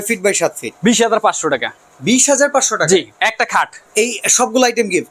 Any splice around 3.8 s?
yes; 1 cut; at 3.8 s

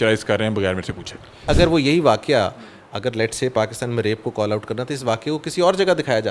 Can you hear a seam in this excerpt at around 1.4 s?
yes; 1 cut; at 1.4 s

